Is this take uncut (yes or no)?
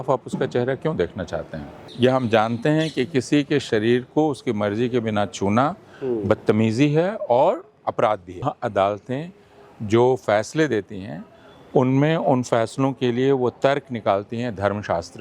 no